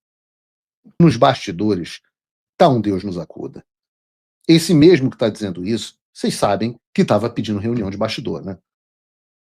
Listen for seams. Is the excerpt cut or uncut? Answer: cut